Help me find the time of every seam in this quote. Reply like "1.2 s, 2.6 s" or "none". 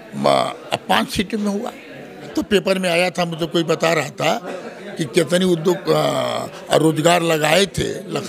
2.3 s

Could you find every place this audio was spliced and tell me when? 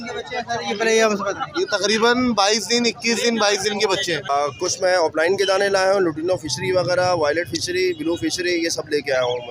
4.3 s

